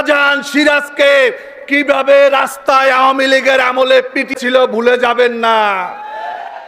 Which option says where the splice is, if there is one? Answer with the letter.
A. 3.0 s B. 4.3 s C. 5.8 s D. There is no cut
B